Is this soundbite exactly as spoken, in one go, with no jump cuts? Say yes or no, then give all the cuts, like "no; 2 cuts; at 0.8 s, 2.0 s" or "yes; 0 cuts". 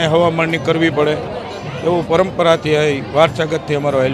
yes; 0 cuts